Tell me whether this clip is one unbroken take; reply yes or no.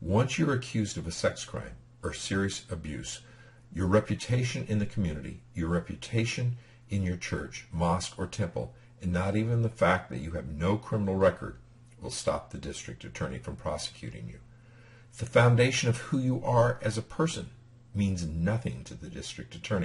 no